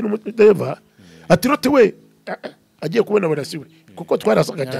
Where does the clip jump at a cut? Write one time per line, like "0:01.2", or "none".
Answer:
none